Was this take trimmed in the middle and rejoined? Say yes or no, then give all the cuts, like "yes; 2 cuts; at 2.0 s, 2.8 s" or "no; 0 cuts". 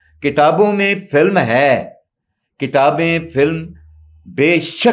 no; 0 cuts